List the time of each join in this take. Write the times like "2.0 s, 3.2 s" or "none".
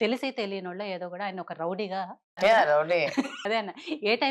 2.3 s, 3.4 s